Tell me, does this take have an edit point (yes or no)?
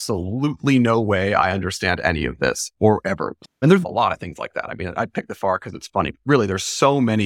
yes